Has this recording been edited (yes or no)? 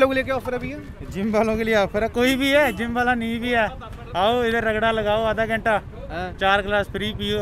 no